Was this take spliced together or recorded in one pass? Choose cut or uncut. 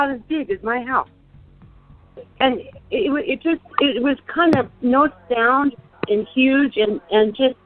cut